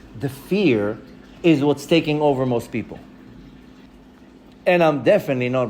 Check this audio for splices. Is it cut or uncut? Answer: cut